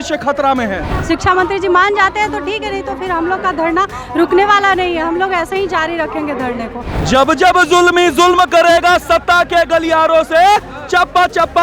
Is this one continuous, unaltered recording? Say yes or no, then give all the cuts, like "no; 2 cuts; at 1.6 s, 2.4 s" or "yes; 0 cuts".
no; 2 cuts; at 0.9 s, 6.9 s